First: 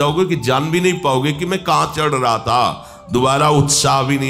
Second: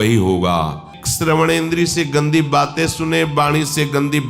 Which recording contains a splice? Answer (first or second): second